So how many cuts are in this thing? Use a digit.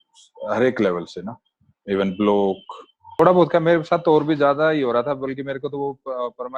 1